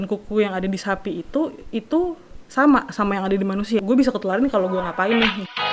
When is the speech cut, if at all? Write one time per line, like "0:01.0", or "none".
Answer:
0:03.8